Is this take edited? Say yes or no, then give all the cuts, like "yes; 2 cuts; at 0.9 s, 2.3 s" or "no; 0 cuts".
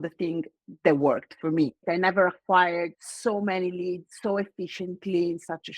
yes; 3 cuts; at 1.8 s, 3.1 s, 4.1 s